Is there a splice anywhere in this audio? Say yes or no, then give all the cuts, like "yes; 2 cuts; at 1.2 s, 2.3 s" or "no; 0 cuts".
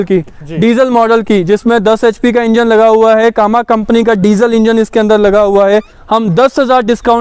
yes; 1 cut; at 6.0 s